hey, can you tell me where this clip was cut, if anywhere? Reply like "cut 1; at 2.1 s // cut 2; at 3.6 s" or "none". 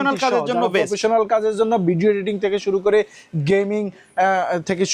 none

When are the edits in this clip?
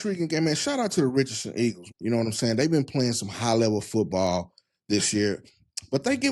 cut 1; at 1.9 s

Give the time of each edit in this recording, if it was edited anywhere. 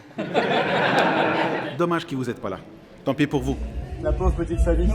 cut 1; at 1.7 s // cut 2; at 3.7 s

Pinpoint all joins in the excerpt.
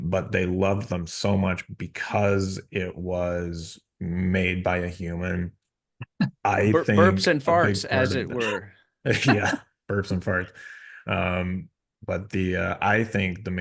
none

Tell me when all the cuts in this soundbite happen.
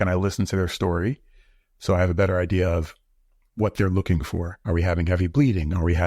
cut 1; at 4.5 s

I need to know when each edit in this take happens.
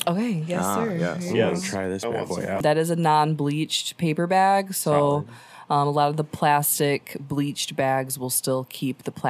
cut 1; at 2.6 s

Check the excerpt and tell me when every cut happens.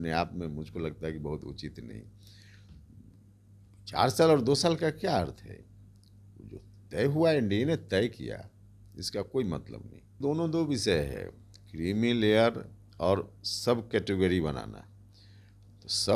cut 1; at 10.2 s

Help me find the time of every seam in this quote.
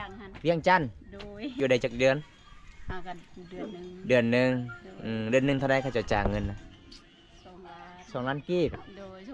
cut 1; at 1.5 s

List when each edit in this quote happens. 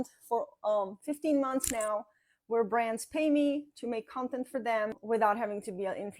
cut 1; at 5.0 s

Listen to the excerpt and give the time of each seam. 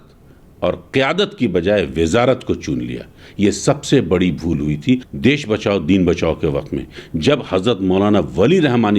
cut 1; at 5.1 s

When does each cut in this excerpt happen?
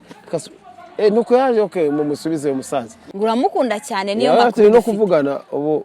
cut 1; at 3.0 s

